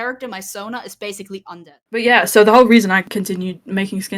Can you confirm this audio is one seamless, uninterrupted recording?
no; 1 cut; at 1.8 s

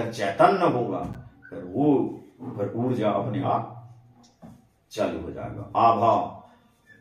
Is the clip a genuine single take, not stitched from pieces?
yes; 0 cuts

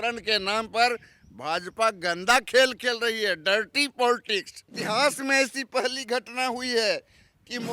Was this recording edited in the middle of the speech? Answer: yes; 1 cut; at 4.7 s

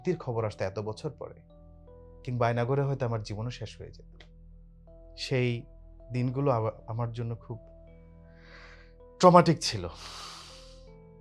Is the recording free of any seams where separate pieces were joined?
no; 3 cuts; at 4.9 s, 7.7 s, 9.2 s

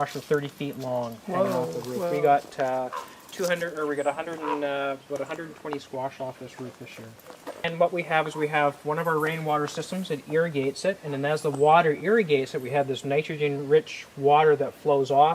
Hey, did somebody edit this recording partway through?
yes; 1 cut; at 7.6 s

